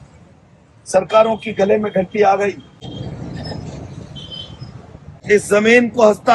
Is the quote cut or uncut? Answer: uncut